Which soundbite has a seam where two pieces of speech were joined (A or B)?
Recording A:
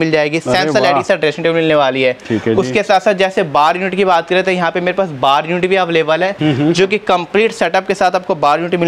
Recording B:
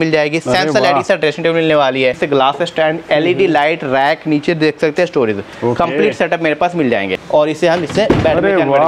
B